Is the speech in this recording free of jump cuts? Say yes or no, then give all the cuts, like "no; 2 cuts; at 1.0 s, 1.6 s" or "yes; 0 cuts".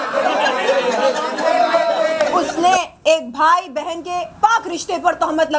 no; 1 cut; at 2.3 s